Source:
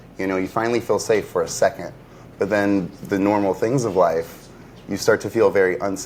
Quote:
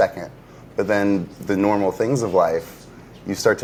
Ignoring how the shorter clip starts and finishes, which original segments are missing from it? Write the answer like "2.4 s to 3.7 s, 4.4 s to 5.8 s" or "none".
none